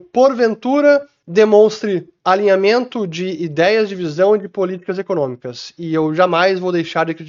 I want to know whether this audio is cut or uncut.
uncut